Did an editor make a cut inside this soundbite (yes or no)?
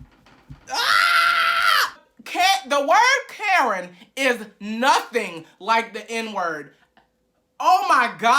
yes